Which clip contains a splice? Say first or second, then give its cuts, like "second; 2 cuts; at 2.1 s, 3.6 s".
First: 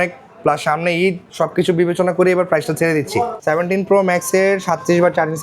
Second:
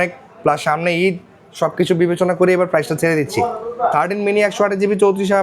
first; 2 cuts; at 1.2 s, 3.4 s